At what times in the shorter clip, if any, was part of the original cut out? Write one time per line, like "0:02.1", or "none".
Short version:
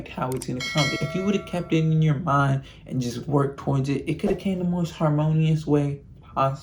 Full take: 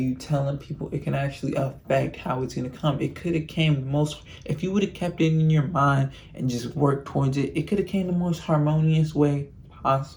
0:00.9